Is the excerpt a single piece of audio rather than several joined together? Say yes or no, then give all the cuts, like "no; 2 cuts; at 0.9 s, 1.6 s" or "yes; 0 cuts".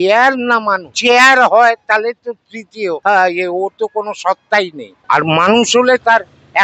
no; 3 cuts; at 0.9 s, 3.0 s, 4.9 s